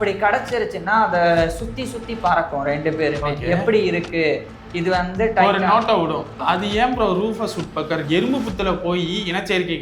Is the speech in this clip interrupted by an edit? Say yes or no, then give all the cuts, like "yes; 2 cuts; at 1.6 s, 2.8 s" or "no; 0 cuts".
yes; 1 cut; at 6.3 s